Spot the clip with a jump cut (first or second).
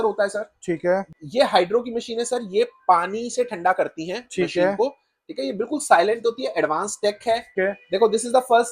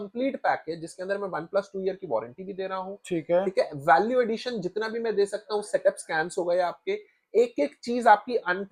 first